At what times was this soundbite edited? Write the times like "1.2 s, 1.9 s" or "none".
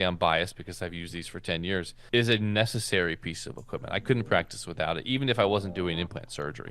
2.0 s